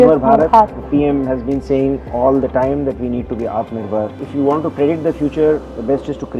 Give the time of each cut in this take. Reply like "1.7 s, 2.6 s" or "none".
4.2 s